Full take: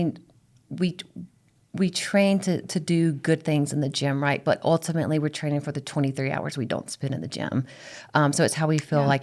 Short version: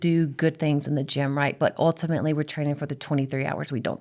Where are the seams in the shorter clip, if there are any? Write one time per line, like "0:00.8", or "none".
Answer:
none

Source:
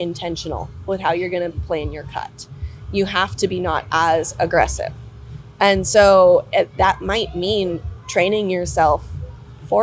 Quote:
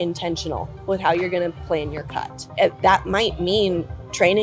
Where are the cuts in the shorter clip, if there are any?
0:02.5

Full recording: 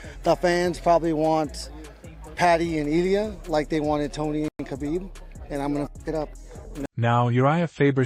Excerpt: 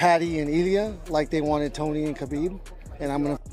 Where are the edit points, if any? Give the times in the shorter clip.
0:02.1

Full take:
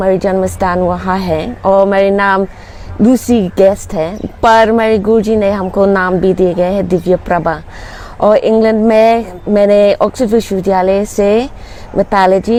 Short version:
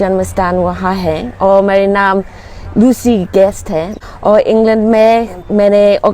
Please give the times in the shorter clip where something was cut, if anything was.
0:04.0

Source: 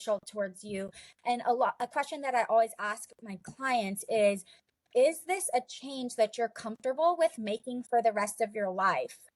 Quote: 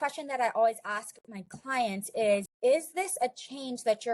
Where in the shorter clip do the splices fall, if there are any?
0:02.5

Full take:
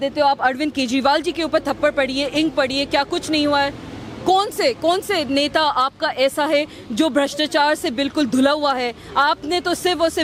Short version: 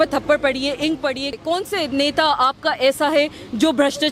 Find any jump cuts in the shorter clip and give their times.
0:01.4

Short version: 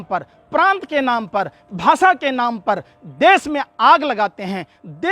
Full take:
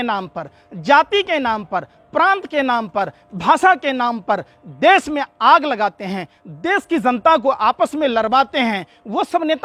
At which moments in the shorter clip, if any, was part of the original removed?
none

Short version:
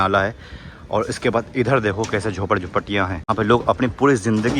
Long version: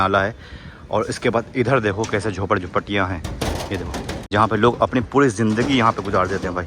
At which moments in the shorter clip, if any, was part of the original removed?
0:03.3

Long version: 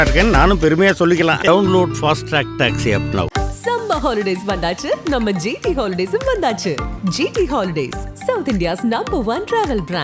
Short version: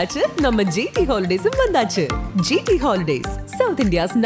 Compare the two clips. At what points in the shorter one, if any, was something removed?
none

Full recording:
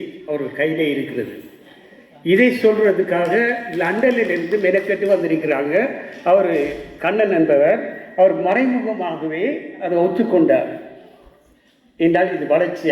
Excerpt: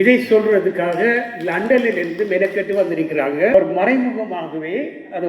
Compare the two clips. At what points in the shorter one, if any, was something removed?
0:03.5

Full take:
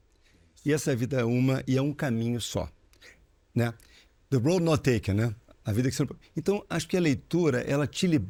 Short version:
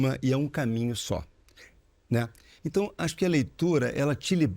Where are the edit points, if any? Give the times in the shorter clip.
0:02.5

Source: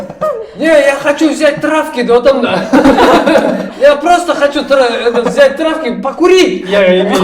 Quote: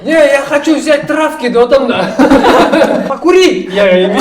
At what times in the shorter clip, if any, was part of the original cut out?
0:03.1

